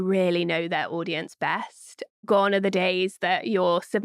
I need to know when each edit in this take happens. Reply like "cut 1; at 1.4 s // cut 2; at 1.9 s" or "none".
cut 1; at 2.1 s